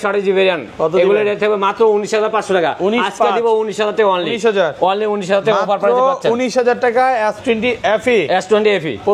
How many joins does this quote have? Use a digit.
0